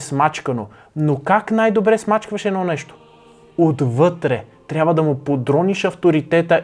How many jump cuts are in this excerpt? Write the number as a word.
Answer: zero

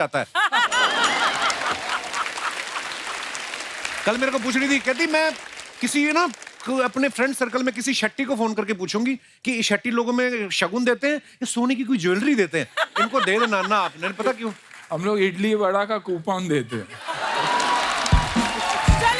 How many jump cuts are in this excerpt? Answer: zero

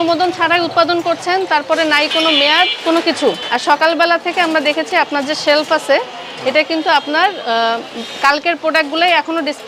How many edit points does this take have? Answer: zero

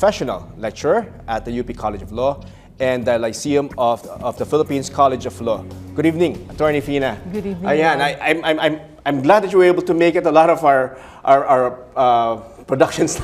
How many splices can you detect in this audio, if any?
one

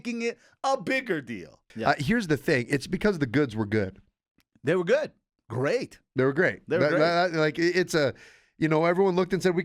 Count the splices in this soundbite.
one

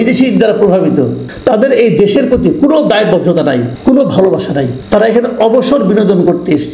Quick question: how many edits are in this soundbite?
three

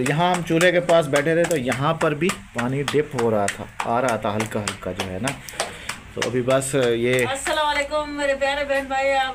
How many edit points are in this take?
zero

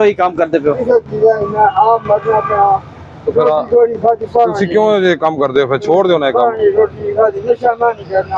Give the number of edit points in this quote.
zero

